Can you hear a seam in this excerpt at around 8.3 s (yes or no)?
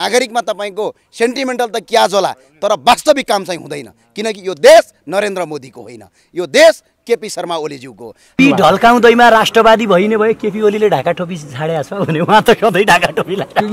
yes